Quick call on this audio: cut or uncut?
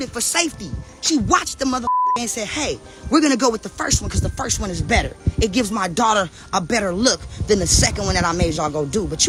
uncut